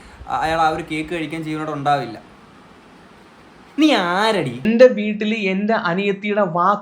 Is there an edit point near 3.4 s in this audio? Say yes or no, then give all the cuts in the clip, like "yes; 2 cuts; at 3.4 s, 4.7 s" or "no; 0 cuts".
no; 1 cut; at 4.6 s